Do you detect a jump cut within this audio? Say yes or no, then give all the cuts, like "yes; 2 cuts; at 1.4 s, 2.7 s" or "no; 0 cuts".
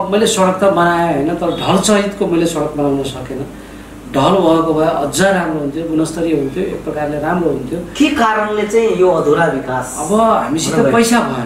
no; 0 cuts